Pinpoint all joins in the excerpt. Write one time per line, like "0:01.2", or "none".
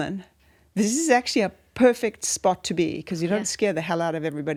none